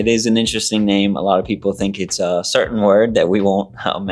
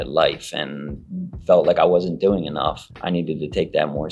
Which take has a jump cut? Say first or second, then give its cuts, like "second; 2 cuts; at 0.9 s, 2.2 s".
second; 1 cut; at 2.9 s